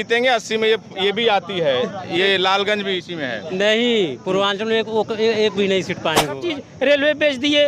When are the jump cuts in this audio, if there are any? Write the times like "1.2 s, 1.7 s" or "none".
6.4 s